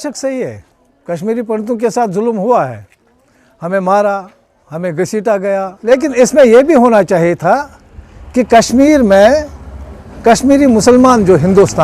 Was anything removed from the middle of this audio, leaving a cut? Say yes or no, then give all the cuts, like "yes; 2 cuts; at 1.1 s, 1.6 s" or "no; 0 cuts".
yes; 1 cut; at 5.8 s